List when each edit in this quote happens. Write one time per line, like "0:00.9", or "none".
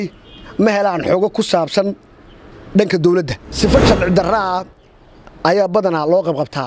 0:03.4